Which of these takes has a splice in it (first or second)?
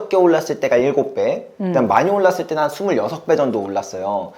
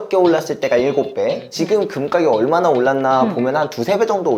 second